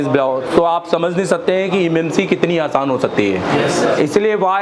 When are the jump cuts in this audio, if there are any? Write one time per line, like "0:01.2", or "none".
none